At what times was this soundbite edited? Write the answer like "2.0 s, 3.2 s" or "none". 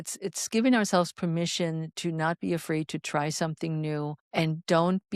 4.2 s